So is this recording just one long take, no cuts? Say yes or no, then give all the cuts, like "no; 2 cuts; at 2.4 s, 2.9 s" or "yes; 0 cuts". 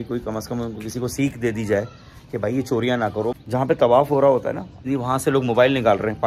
no; 2 cuts; at 3.4 s, 4.8 s